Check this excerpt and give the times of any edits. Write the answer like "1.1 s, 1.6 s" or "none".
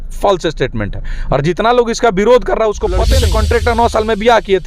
3.1 s